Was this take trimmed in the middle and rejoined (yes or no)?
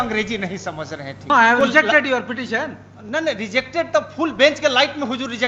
yes